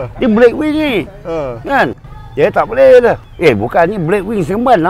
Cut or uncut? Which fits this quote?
cut